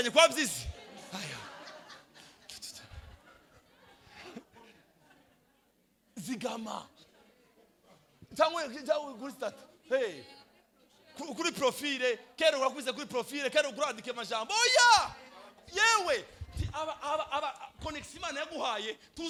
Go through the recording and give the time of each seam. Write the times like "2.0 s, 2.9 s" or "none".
none